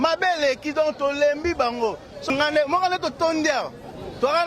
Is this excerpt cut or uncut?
cut